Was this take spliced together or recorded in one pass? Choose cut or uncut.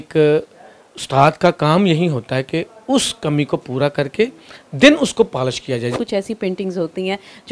cut